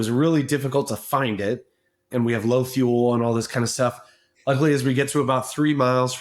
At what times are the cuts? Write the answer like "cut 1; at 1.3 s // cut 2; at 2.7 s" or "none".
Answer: cut 1; at 2.0 s

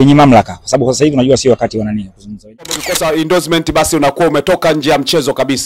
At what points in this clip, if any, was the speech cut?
cut 1; at 2.7 s

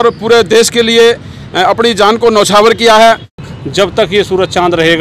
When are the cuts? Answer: cut 1; at 3.4 s

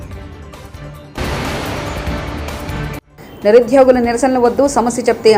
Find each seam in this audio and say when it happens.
none

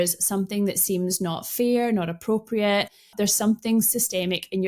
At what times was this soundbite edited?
cut 1; at 3.0 s

